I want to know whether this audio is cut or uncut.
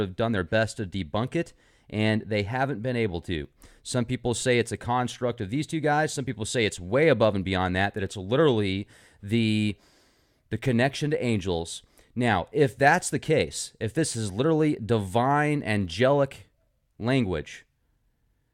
uncut